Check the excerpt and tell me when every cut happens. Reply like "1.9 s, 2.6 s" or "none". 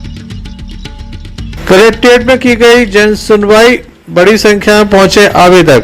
1.5 s